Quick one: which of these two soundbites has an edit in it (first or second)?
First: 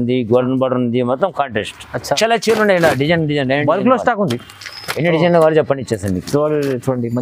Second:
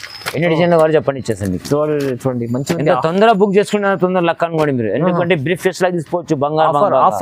first